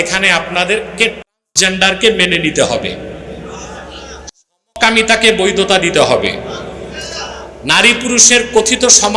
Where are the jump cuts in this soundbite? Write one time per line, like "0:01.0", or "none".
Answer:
none